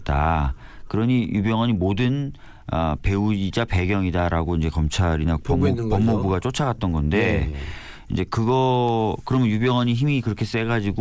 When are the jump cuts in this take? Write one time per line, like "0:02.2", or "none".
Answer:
none